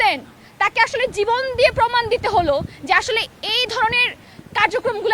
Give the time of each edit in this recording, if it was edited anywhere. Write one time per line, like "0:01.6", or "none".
none